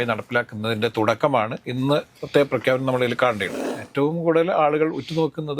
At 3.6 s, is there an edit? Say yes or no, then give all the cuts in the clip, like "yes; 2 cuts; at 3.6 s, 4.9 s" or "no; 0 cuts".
yes; 1 cut; at 3.6 s